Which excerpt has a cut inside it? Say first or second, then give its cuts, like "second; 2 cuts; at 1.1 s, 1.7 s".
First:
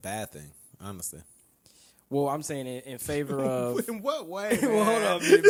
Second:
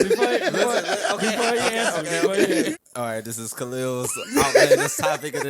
second; 1 cut; at 2.8 s